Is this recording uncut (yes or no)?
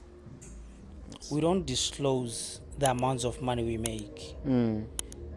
no